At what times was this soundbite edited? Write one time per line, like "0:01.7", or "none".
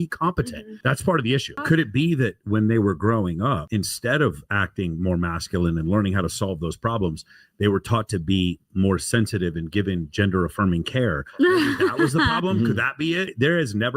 0:01.6